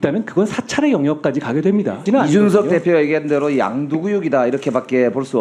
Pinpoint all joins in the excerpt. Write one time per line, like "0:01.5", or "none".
0:02.0